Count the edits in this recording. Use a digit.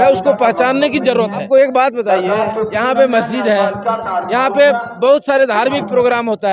1